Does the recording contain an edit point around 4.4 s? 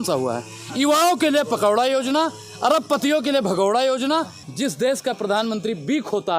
yes; 1 cut; at 4.4 s

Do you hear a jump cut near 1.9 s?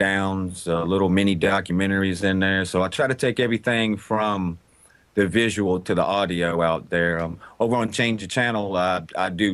yes; 1 cut; at 1.9 s

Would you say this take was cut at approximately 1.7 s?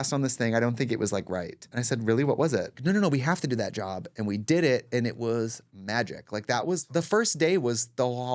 yes; 2 cuts; at 1.7 s, 2.7 s

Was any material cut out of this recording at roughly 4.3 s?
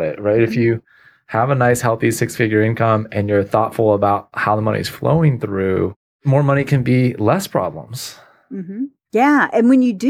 no; 1 cut; at 6.2 s

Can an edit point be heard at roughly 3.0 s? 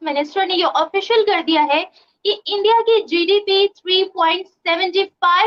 no; 0 cuts

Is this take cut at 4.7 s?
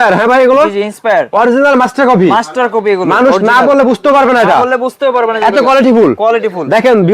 no; 0 cuts

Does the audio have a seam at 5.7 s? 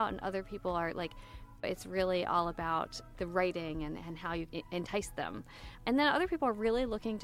yes; 4 cuts; at 1.6 s, 3.0 s, 4.5 s, 5.7 s

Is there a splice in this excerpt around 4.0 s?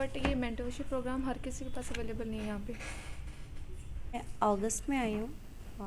yes; 1 cut; at 4.0 s

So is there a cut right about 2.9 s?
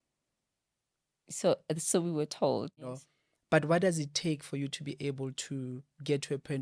yes; 1 cut; at 2.9 s

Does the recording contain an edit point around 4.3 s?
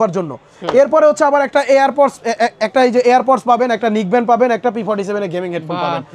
no; 0 cuts

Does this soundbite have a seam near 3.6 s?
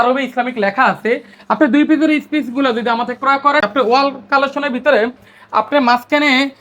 yes; 1 cut; at 3.6 s

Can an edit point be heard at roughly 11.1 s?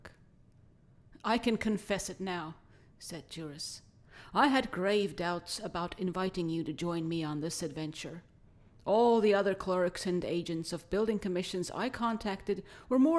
yes; 1 cut; at 11.1 s

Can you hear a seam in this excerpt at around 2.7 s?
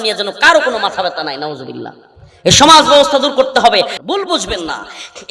no; 1 cut; at 3.9 s

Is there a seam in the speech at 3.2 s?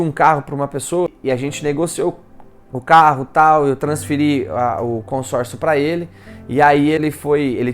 no; 2 cuts; at 1.1 s, 7.0 s

